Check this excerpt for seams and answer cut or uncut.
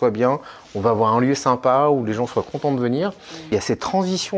cut